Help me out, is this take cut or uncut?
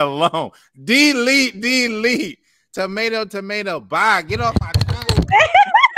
uncut